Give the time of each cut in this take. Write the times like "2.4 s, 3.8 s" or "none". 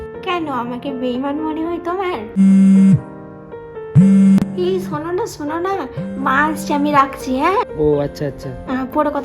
2.4 s